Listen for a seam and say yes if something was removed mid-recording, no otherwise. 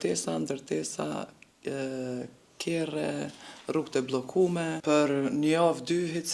yes